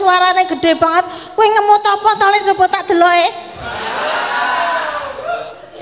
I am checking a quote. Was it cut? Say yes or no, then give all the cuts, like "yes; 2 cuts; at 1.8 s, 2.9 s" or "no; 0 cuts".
no; 0 cuts